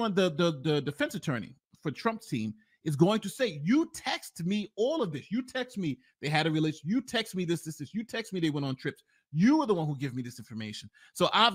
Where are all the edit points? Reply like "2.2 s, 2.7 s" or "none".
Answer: none